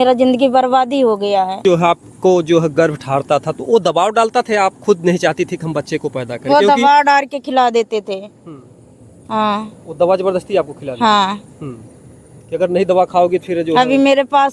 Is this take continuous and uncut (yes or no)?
no